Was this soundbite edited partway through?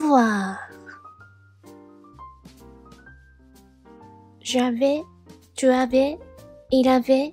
yes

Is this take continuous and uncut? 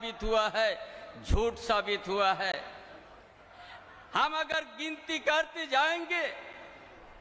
yes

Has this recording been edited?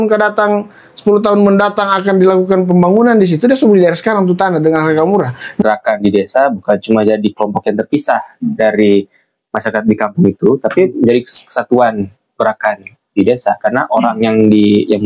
yes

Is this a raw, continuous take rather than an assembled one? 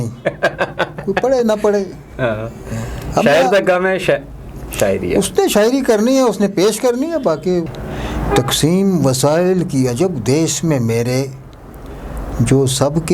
no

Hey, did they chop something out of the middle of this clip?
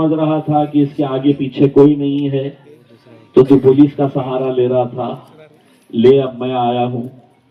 no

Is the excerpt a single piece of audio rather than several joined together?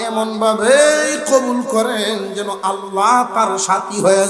yes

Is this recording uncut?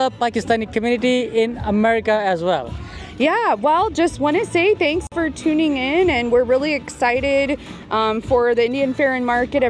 yes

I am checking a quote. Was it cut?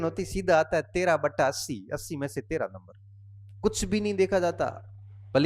no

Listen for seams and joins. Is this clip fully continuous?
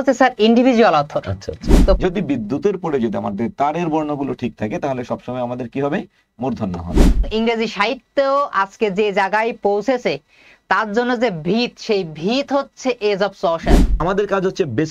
no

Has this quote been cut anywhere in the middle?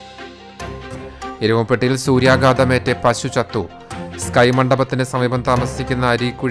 no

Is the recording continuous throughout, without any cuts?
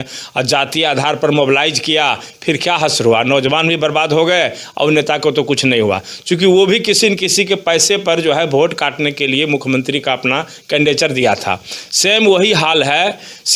yes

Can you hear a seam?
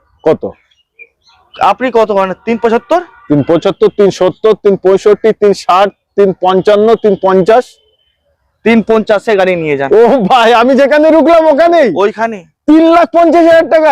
no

